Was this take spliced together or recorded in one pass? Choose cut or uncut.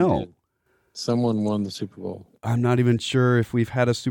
cut